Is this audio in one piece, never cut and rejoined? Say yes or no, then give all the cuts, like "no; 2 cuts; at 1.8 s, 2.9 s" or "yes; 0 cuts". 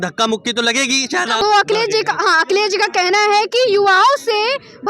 no; 1 cut; at 1.4 s